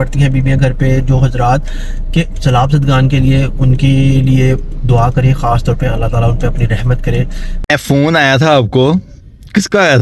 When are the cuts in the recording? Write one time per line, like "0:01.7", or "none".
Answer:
0:07.7

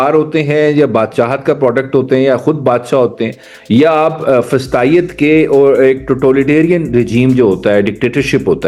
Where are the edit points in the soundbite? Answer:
none

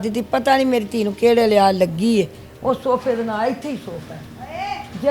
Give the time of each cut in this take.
none

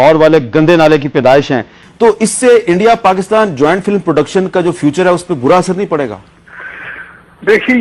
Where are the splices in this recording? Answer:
none

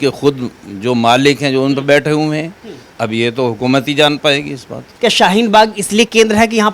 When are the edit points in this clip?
0:04.9

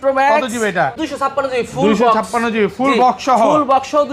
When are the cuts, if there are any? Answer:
0:01.0

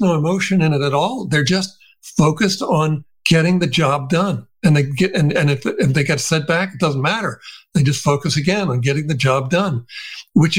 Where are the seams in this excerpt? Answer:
none

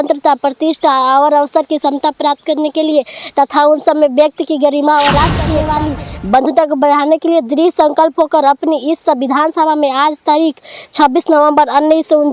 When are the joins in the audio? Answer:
0:05.6

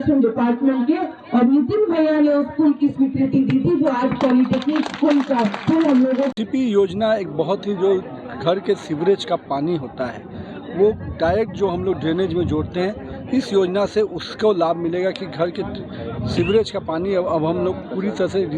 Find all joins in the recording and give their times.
0:06.3

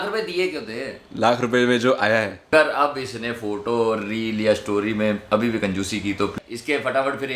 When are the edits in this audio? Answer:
0:02.4
0:06.3

